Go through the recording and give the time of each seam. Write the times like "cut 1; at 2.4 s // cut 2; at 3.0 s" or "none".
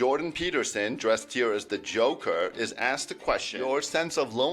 cut 1; at 3.5 s